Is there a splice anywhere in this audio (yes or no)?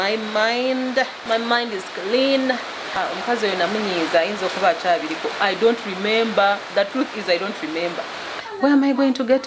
yes